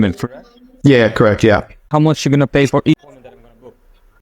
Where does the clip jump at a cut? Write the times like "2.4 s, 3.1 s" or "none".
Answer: 1.9 s